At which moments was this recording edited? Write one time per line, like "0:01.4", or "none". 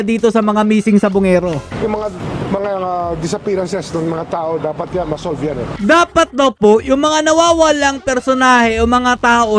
0:01.7
0:05.7

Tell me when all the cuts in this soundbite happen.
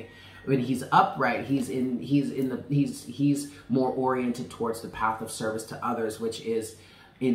none

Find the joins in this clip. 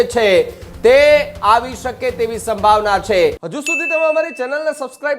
0:03.5

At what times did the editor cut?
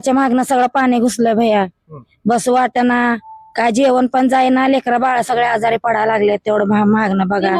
none

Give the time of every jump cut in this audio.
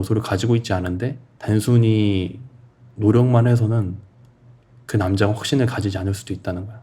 0:01.3

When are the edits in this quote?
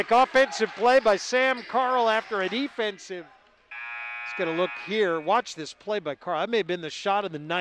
none

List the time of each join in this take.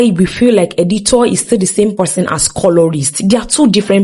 none

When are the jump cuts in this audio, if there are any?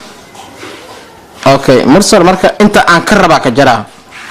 none

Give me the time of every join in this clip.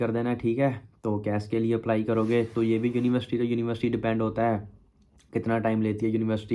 none

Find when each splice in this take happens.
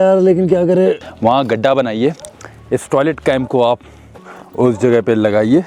0:01.1

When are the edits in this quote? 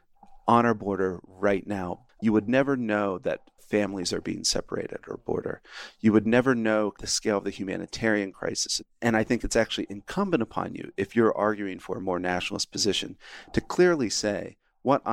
0:02.0
0:07.1
0:08.9

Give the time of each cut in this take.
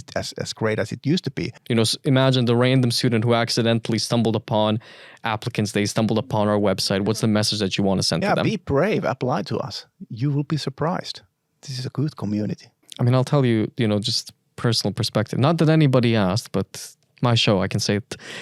0:01.6
0:12.8

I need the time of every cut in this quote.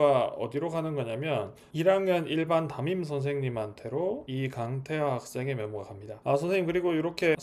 0:06.1

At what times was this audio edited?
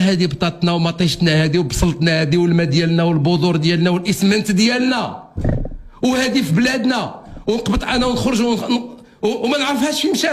none

